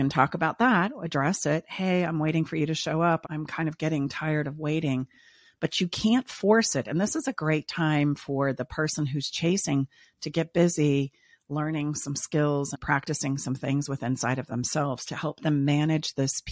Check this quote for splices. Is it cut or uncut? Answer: uncut